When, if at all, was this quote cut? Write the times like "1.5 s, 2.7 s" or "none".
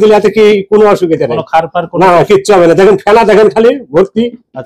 none